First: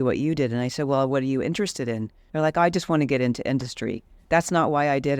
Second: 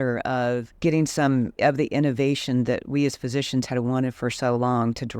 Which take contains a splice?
first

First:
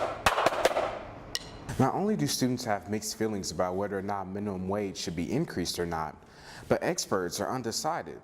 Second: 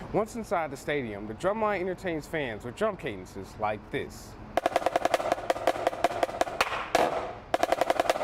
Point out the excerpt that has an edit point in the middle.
first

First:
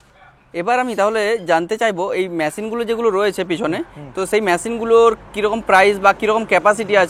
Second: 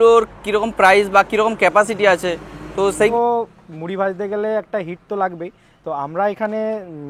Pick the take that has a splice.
second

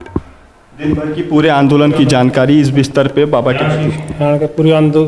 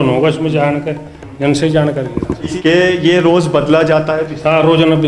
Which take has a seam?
second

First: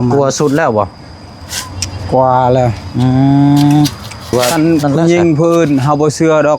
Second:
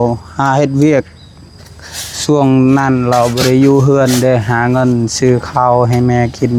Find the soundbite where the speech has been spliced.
first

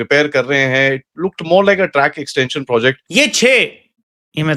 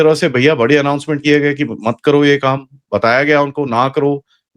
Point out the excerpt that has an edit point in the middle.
first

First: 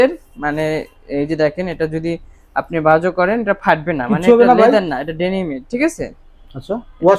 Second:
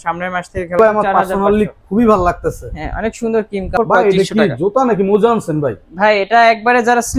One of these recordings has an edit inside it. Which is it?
second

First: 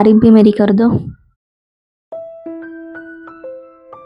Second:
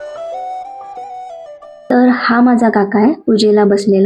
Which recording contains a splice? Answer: second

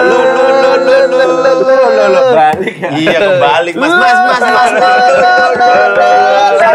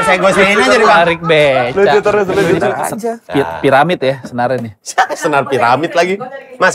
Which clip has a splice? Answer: second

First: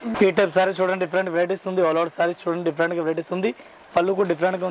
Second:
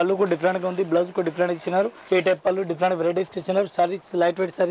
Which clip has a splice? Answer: second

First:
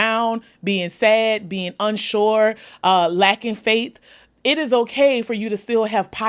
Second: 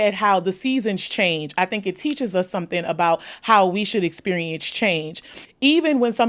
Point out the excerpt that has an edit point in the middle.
second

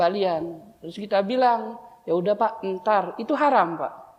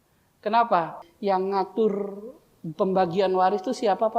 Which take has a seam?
second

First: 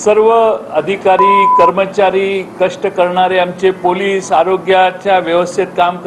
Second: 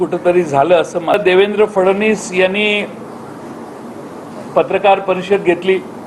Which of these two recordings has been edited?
second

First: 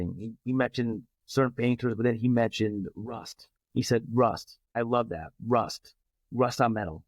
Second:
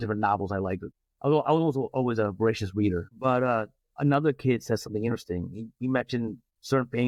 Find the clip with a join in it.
first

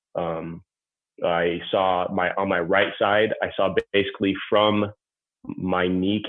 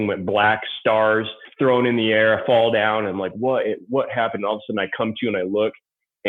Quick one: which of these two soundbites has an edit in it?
second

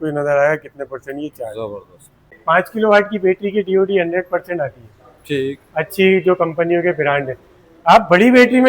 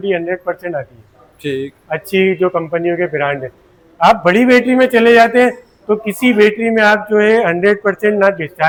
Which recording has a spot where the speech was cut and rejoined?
first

